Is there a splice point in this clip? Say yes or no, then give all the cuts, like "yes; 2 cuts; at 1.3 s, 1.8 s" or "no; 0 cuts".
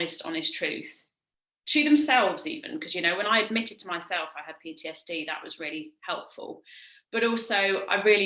no; 0 cuts